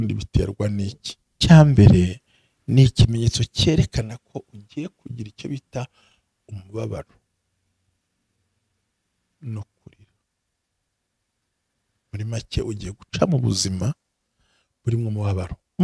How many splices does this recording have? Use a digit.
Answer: 1